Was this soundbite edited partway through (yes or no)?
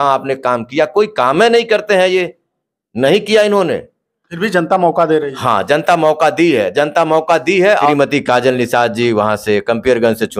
yes